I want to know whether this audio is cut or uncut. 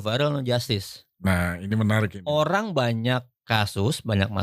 uncut